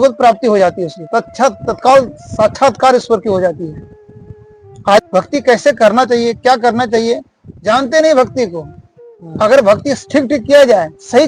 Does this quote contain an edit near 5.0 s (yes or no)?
yes